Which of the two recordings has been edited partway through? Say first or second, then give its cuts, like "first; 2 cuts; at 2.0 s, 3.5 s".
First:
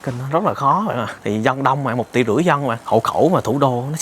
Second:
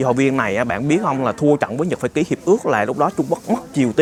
first; 2 cuts; at 1.1 s, 2.7 s